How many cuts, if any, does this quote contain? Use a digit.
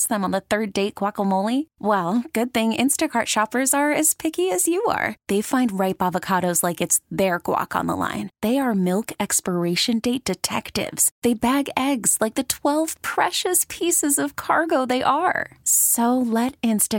0